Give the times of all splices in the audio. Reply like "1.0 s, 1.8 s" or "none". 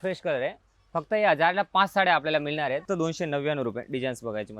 2.8 s